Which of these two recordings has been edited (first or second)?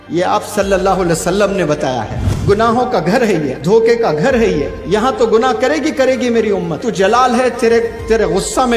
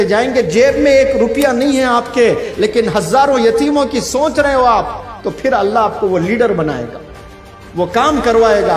first